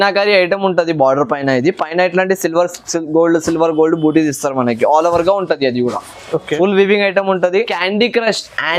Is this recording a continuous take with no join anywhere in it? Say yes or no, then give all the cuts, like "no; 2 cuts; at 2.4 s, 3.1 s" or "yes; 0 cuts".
no; 1 cut; at 7.7 s